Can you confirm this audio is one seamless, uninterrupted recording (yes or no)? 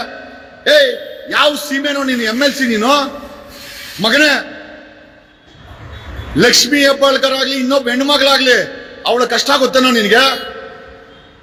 yes